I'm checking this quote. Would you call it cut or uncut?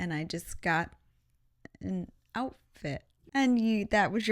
cut